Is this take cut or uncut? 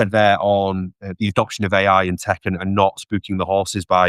uncut